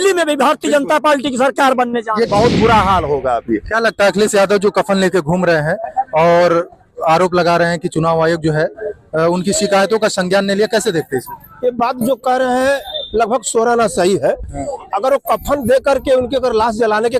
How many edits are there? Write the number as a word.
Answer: one